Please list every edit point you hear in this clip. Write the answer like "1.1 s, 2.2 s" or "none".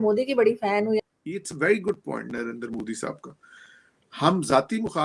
1.0 s